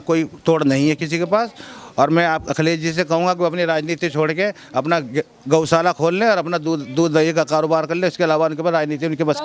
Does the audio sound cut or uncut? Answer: uncut